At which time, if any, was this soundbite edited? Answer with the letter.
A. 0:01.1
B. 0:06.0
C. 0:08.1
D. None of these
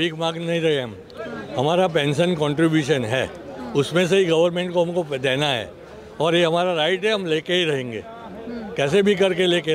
D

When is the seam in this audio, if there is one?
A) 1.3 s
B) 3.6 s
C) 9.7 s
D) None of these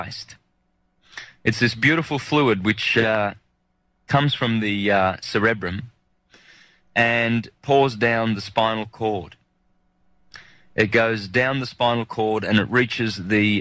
C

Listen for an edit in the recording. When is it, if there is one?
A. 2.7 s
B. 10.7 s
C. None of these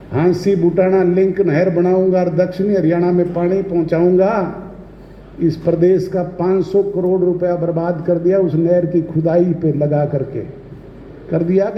C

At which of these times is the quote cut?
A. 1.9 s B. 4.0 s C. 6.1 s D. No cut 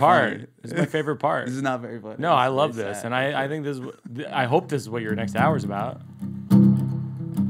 C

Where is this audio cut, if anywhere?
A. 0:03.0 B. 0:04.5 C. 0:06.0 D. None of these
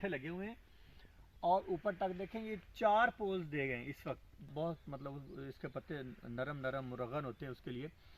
D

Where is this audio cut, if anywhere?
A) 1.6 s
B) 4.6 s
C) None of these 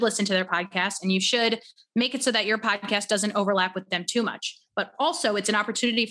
C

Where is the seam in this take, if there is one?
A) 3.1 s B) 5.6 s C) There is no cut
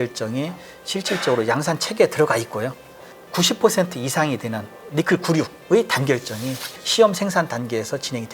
B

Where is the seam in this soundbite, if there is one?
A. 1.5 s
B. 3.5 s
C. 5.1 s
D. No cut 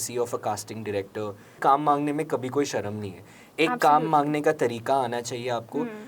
A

